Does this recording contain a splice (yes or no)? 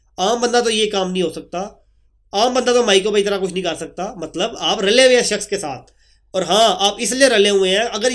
no